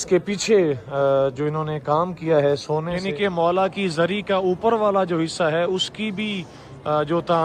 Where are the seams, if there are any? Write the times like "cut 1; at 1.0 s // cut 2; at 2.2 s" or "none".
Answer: cut 1; at 2.9 s